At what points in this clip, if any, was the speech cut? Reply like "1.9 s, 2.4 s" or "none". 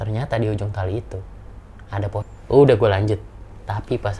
2.3 s